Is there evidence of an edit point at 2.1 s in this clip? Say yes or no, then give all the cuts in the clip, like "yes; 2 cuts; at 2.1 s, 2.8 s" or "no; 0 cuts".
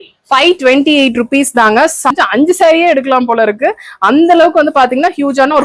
yes; 1 cut; at 2.1 s